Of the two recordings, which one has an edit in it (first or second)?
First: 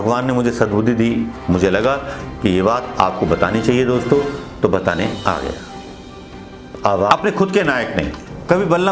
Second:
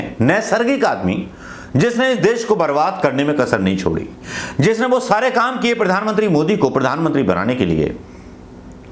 first